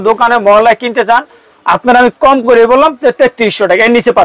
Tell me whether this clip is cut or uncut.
uncut